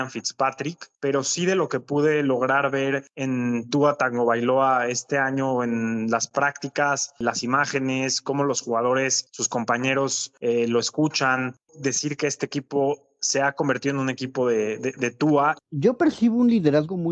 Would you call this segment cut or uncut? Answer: cut